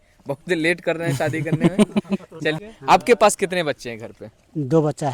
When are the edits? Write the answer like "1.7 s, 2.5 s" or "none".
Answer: 2.7 s